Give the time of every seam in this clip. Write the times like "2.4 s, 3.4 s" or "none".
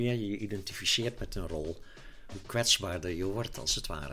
2.3 s